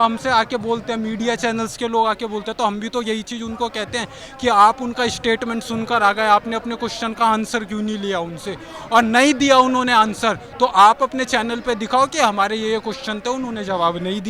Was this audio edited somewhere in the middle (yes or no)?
no